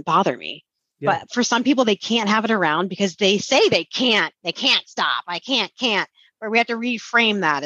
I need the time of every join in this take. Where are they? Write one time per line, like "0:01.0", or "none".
none

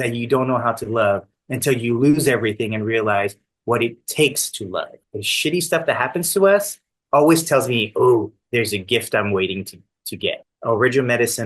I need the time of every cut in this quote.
0:05.0
0:10.5

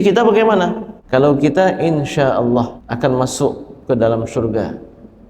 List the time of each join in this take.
0:00.9
0:02.8

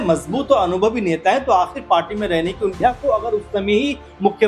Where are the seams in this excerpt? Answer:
0:02.8

